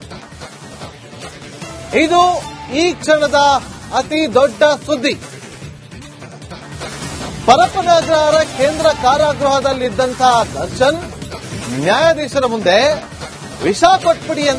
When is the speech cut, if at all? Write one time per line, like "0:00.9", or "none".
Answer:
0:01.3